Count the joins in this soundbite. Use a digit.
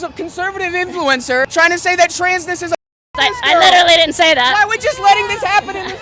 2